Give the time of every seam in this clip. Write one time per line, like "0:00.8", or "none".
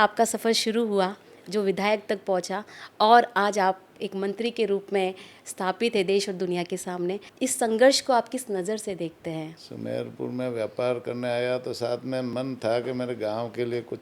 0:07.3
0:09.6